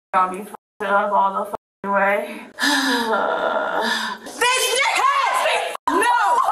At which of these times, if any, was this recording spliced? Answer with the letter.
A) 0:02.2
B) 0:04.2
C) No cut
B